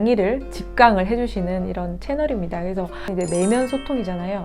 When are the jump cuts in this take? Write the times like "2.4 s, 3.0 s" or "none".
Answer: 3.1 s